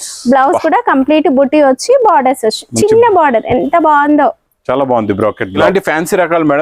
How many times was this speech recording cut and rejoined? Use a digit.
1